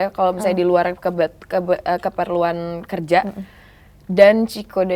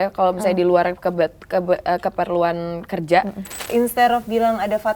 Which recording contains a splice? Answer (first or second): second